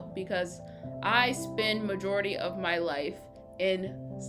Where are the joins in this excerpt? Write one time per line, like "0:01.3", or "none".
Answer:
none